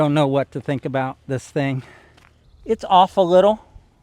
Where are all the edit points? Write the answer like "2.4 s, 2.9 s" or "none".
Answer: 1.9 s

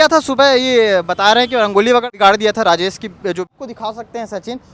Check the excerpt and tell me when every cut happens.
2.0 s, 3.5 s

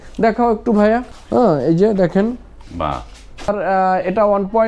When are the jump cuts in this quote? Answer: 1.1 s, 3.5 s

